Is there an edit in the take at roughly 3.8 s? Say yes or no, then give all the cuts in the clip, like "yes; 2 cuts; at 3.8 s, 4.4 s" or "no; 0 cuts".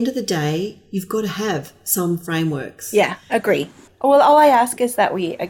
yes; 1 cut; at 3.8 s